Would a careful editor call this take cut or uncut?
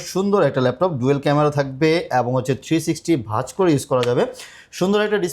uncut